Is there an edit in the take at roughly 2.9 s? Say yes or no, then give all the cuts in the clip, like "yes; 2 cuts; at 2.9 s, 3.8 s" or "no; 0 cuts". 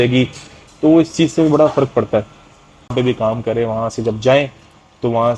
yes; 1 cut; at 2.9 s